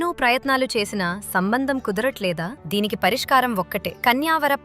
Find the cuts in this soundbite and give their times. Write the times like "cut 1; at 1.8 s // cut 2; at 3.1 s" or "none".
cut 1; at 2.5 s